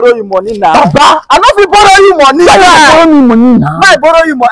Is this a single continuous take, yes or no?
yes